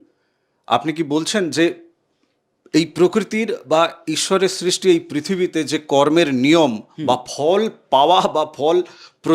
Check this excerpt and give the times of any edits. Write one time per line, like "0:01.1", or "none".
none

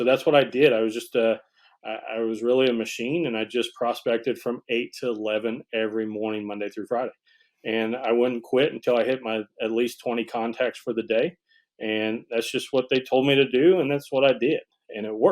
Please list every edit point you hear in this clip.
none

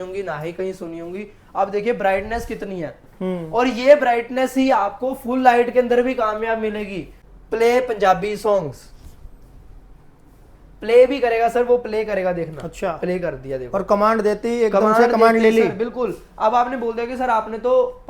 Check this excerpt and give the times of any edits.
0:07.1

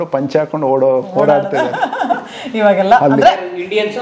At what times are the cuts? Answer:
none

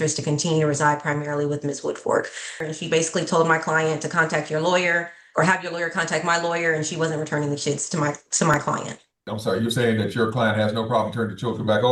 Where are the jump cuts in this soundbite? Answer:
0:02.5
0:09.2

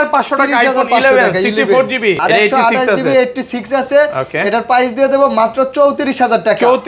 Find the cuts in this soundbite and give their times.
0:02.2

